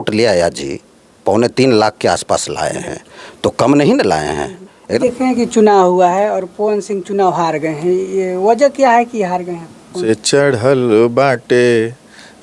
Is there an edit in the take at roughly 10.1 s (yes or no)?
yes